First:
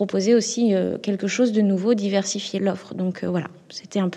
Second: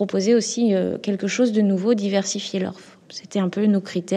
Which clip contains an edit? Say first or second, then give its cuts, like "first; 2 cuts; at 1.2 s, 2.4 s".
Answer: second; 1 cut; at 2.6 s